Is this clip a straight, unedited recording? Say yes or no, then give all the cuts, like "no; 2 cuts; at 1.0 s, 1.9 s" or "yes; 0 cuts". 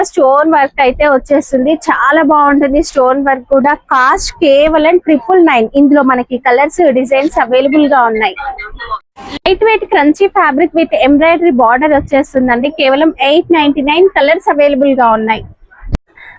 yes; 0 cuts